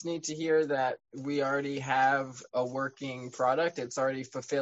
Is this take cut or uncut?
cut